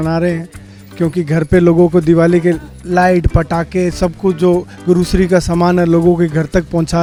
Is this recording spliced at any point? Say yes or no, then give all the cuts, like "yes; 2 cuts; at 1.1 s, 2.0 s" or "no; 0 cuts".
no; 0 cuts